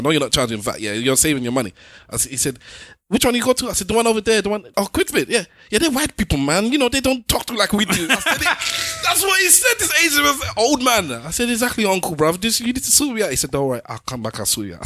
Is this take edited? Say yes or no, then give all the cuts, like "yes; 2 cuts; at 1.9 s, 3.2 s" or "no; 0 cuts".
yes; 1 cut; at 4.7 s